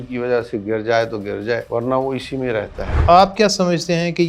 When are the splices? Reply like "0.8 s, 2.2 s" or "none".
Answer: 1.6 s, 3.0 s